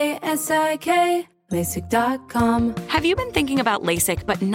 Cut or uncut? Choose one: cut